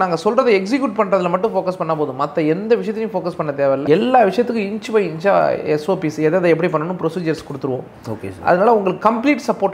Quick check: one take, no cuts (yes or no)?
yes